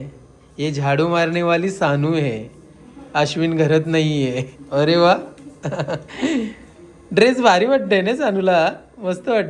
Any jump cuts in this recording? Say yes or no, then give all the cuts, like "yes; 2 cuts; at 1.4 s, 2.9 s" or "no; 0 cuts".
no; 0 cuts